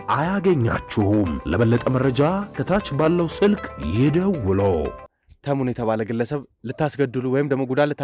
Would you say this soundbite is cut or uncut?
cut